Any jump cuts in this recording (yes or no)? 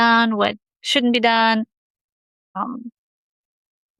no